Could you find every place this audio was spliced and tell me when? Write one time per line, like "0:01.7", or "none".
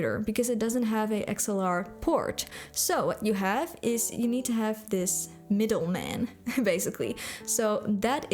0:05.3